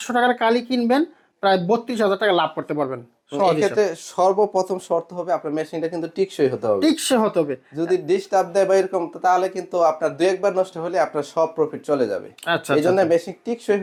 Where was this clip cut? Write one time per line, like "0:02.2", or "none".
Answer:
none